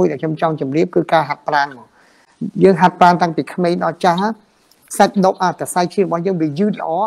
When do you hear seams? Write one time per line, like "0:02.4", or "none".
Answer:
none